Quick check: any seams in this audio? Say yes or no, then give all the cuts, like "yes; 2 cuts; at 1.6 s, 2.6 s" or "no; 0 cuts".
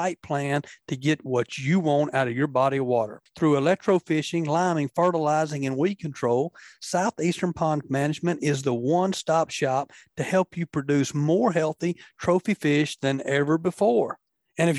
no; 0 cuts